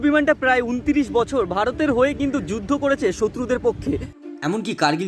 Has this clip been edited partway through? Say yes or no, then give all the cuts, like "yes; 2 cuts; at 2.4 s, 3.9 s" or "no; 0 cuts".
no; 0 cuts